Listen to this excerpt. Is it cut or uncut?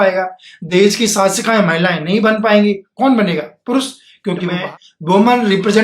cut